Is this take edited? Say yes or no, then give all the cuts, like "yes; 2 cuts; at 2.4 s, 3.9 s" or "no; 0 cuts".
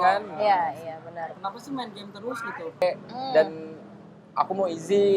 yes; 2 cuts; at 1.3 s, 2.8 s